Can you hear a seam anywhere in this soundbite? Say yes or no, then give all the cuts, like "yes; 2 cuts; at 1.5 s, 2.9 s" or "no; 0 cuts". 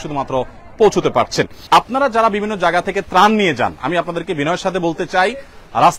yes; 1 cut; at 1.6 s